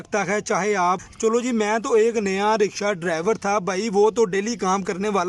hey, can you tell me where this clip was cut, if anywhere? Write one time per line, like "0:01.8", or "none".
0:01.1